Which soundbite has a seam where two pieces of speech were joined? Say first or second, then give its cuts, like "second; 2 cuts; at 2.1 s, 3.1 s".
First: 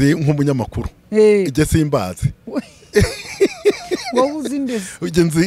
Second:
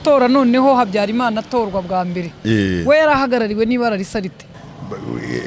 second; 1 cut; at 4.5 s